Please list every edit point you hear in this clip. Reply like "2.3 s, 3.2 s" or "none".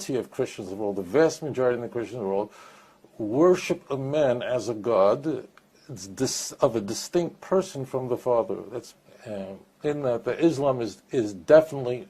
8.9 s

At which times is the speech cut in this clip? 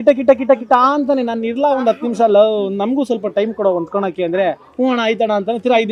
none

